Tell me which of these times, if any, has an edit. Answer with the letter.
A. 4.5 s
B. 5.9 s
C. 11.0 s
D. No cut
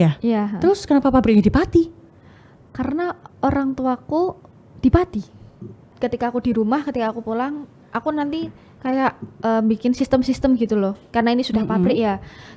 B